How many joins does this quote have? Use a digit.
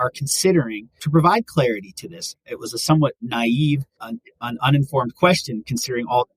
0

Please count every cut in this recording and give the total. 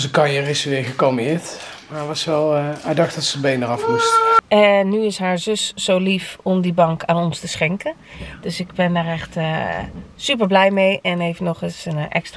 1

